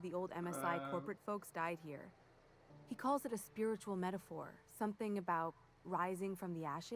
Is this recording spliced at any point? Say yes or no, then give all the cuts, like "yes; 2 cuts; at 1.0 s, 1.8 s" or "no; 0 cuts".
no; 0 cuts